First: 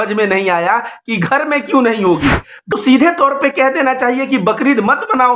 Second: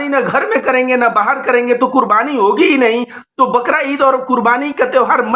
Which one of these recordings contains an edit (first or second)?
first